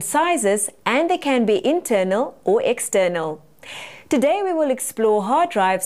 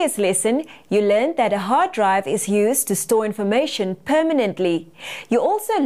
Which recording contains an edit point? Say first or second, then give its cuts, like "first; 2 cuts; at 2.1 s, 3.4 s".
second; 1 cut; at 2.6 s